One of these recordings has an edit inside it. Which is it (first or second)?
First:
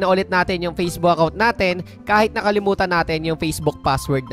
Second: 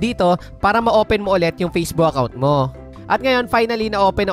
second